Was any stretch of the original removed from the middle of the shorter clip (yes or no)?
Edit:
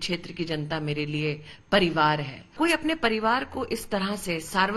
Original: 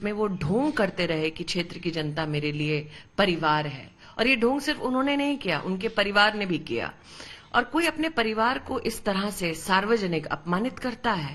yes